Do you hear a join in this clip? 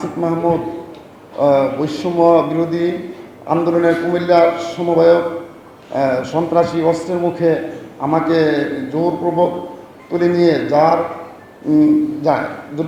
no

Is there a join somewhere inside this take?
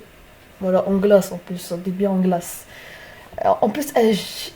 no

